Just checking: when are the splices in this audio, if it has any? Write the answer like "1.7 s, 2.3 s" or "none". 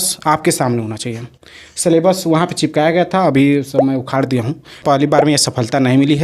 4.8 s